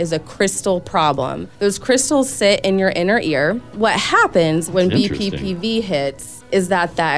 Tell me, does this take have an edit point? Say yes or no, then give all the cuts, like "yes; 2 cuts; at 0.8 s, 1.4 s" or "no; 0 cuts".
yes; 1 cut; at 3.7 s